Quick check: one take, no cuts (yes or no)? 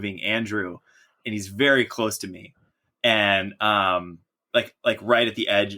yes